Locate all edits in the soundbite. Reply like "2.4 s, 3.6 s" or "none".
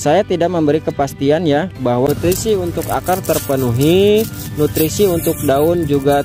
2.1 s

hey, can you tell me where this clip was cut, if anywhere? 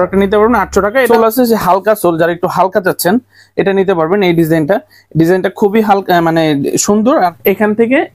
1.1 s, 7.4 s

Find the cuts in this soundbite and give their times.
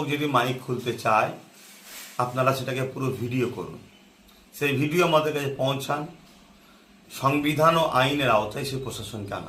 none

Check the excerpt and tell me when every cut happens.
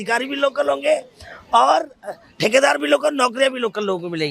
none

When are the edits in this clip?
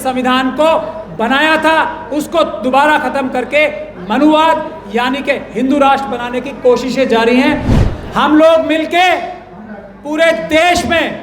7.8 s

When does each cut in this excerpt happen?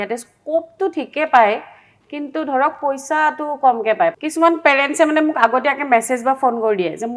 4.1 s

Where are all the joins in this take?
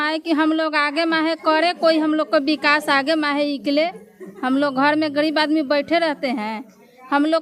none

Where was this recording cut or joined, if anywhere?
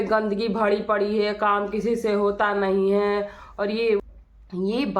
4.0 s

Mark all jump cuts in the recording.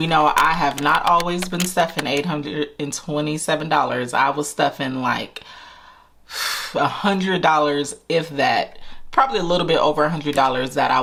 none

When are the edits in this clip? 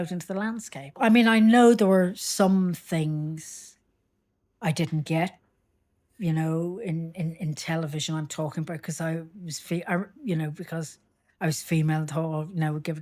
1.0 s

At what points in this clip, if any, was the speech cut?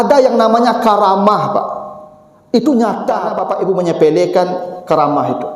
3.3 s

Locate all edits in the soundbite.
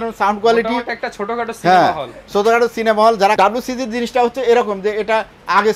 3.4 s

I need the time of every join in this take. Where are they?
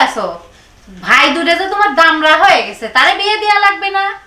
none

